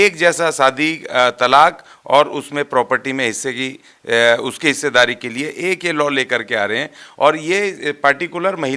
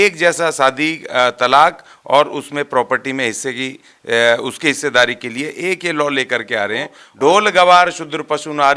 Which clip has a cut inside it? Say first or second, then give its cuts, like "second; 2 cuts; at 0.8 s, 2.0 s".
second; 1 cut; at 7.0 s